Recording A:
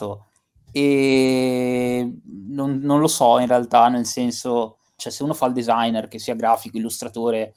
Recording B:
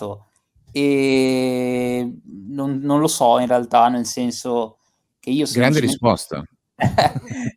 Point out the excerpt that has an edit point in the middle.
A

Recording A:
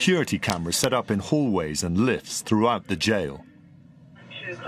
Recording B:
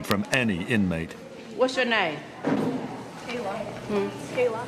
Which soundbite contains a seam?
B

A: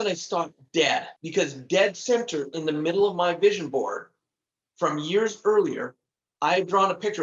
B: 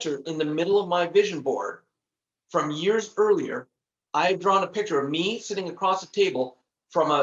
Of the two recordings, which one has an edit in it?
A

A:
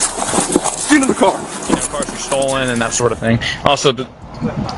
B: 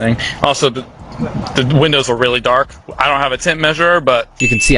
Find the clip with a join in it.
A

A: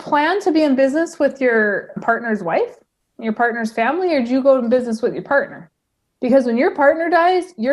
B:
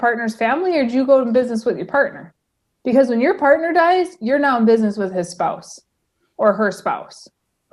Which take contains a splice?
A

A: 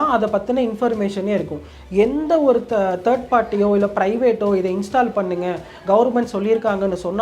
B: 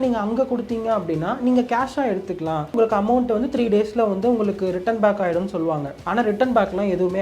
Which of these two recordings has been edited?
B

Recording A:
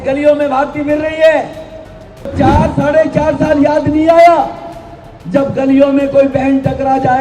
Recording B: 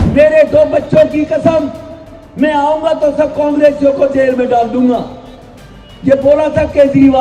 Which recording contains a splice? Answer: A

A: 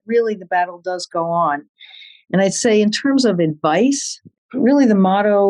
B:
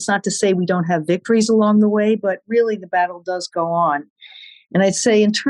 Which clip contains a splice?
A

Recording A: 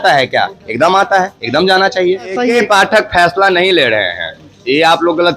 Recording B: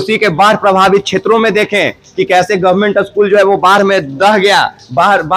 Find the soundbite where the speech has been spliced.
A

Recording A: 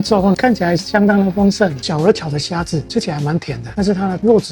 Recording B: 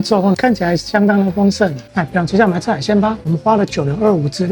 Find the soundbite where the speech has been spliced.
A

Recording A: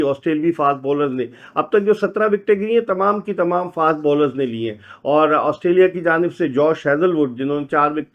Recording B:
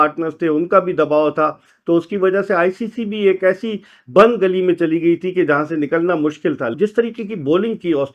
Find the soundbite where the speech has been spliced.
B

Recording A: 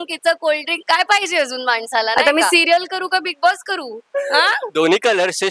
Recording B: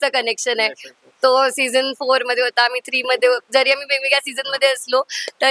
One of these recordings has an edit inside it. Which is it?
A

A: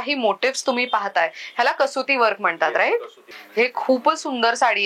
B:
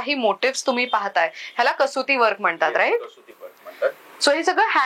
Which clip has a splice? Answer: A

